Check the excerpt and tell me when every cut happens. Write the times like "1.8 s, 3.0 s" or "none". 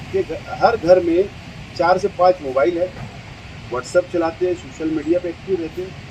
none